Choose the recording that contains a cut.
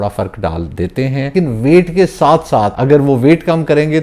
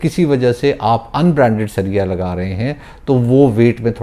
first; 2 cuts; at 1.3 s, 2.7 s

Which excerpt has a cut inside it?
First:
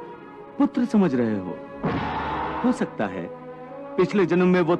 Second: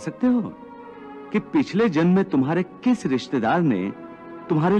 first; 1 cut; at 2.6 s

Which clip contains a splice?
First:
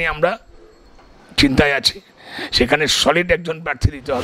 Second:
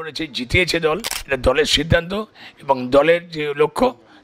second; 1 cut; at 1.1 s

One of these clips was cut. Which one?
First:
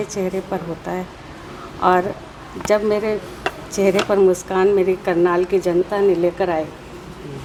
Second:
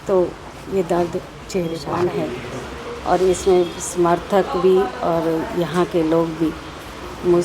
second; 1 cut; at 1.8 s

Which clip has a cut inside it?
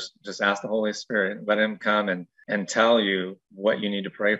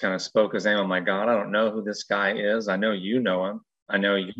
first; 2 cuts; at 2.3 s, 3.4 s

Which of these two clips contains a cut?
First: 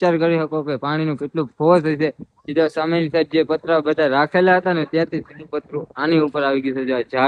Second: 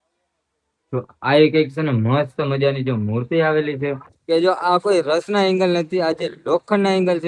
second; 1 cut; at 4.1 s

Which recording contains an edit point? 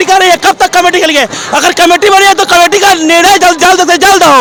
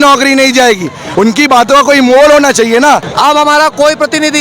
second; 2 cuts; at 1.0 s, 3.1 s

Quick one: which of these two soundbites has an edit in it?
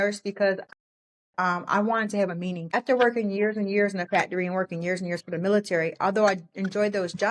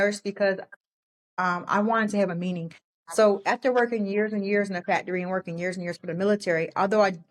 first; 1 cut; at 2.7 s

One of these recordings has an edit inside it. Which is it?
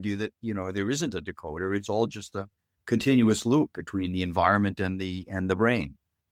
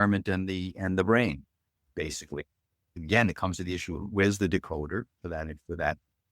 second; 1 cut; at 2.8 s

